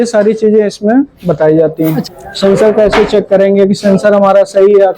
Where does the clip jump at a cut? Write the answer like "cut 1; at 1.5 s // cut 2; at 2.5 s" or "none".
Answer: cut 1; at 2.0 s

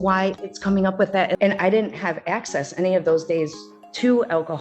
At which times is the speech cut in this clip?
cut 1; at 1.4 s

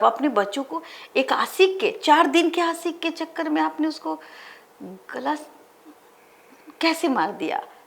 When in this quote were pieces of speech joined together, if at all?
none

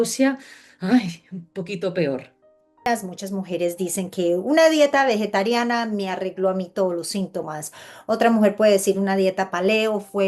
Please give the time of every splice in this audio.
cut 1; at 2.8 s

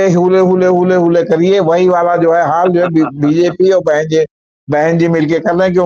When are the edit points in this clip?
none

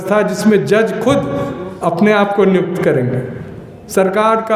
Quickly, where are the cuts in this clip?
none

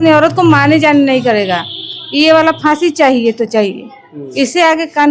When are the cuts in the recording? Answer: none

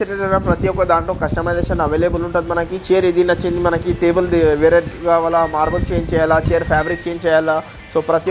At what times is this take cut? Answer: none

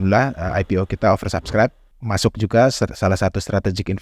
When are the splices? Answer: cut 1; at 1.8 s

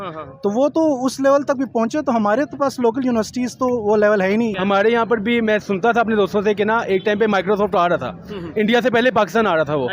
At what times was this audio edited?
cut 1; at 4.5 s

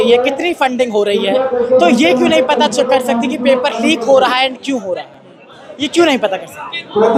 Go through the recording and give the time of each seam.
none

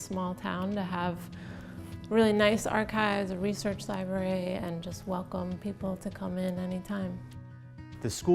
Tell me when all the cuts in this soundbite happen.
cut 1; at 7.4 s

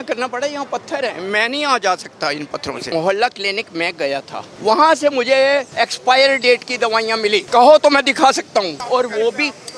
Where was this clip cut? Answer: cut 1; at 2.9 s // cut 2; at 4.4 s // cut 3; at 5.7 s // cut 4; at 7.5 s // cut 5; at 8.8 s

